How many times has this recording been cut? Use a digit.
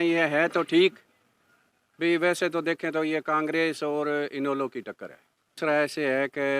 1